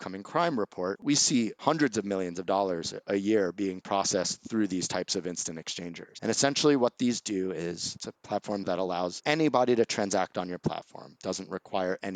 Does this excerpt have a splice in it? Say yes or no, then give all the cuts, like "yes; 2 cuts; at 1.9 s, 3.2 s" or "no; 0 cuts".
yes; 3 cuts; at 0.9 s, 6.0 s, 8.6 s